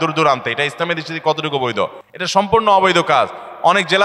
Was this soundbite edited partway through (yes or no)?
no